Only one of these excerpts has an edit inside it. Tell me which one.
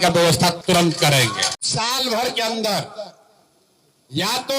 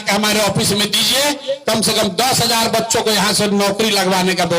first; 1 cut; at 1.5 s

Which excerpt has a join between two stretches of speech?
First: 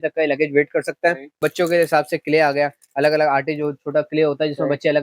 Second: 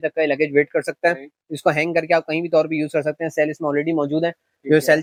first; 1 cut; at 1.4 s

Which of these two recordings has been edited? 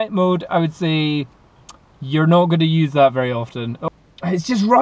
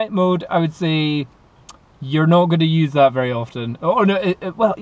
first; 1 cut; at 3.7 s

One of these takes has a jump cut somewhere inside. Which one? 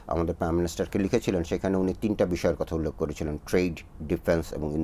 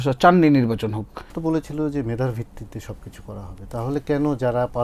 second; 1 cut; at 1.3 s

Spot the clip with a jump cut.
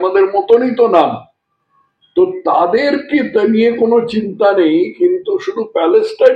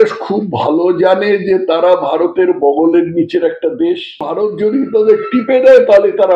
second; 1 cut; at 4.3 s

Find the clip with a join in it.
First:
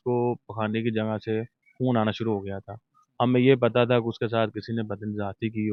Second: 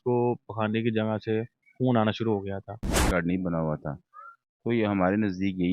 second; 1 cut; at 3.1 s

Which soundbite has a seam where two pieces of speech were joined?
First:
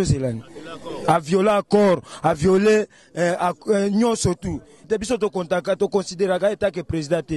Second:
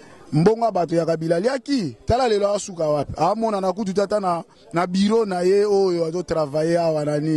first; 1 cut; at 4.9 s

